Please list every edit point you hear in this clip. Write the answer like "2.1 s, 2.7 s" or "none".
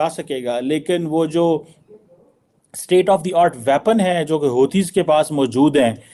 none